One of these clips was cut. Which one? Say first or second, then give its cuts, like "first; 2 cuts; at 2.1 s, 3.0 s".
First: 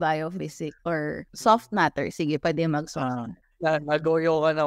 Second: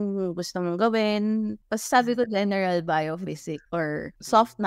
second; 1 cut; at 1.6 s